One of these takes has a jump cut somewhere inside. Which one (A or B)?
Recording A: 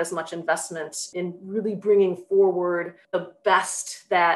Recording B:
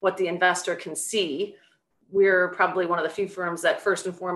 A